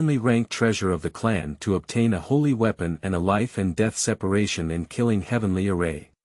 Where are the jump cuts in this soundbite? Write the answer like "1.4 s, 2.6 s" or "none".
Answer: none